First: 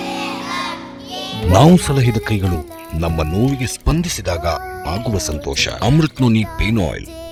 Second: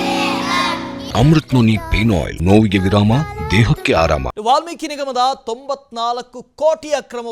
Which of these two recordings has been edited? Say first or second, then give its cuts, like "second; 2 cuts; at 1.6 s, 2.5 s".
second; 3 cuts; at 1.0 s, 2.3 s, 4.3 s